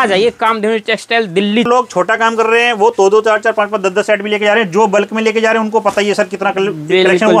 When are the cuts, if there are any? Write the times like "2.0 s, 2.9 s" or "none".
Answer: 1.7 s